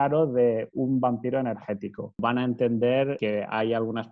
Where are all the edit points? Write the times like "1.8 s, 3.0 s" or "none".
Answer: 2.2 s, 3.2 s

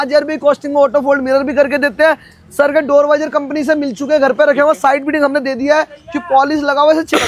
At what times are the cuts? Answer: none

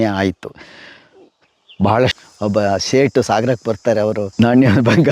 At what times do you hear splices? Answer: 2.2 s, 4.3 s

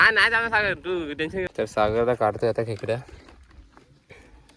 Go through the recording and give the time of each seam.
1.5 s

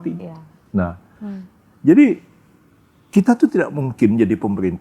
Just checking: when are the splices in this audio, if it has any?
none

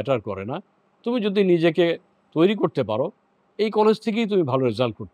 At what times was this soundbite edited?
none

